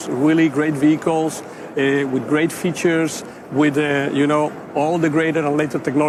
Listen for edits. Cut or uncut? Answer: uncut